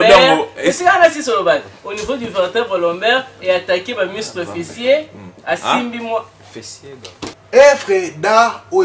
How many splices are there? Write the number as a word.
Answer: one